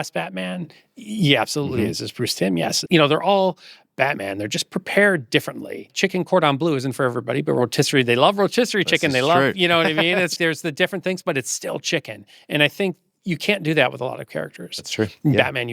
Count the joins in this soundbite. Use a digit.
3